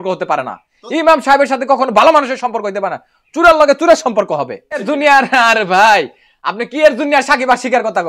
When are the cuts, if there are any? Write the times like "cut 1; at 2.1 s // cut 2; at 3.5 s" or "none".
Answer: cut 1; at 4.6 s